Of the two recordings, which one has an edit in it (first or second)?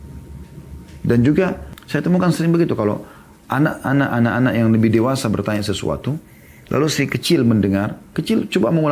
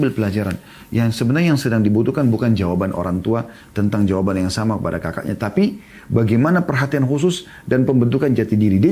first